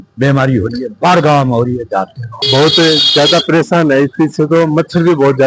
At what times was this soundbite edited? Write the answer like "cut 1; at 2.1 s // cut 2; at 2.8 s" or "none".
cut 1; at 2.4 s